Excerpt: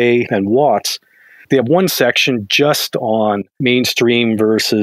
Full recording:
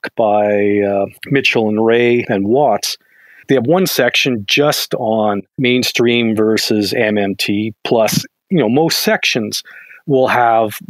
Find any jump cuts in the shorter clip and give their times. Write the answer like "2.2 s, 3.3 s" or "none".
none